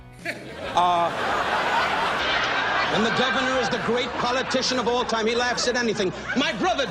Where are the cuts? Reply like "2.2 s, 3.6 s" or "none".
2.2 s